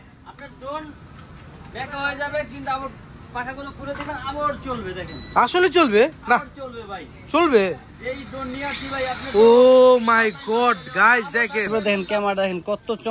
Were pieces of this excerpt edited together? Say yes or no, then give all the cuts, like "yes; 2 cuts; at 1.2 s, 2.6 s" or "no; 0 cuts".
yes; 1 cut; at 11.7 s